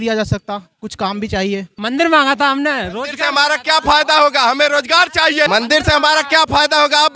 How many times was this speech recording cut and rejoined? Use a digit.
2